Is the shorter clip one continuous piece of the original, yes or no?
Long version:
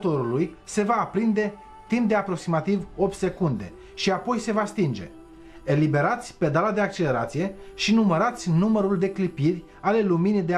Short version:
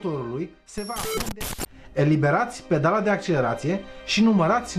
no